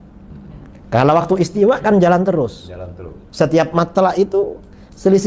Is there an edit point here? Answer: no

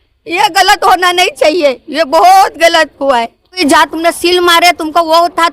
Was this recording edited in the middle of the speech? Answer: yes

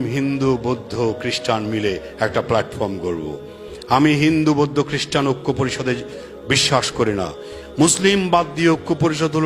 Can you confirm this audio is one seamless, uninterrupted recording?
yes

